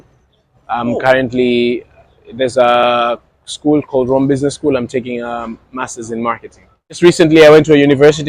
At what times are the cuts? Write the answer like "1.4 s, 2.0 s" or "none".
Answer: 7.0 s